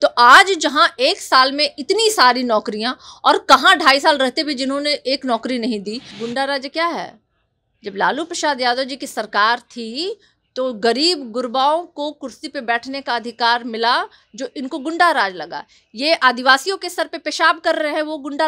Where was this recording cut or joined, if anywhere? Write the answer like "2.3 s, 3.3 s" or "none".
6.1 s